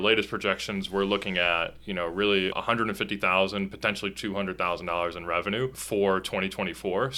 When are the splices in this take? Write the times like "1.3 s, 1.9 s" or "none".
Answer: none